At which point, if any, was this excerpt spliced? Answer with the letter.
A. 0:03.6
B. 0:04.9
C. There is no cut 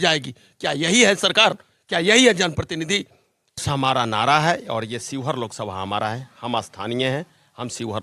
A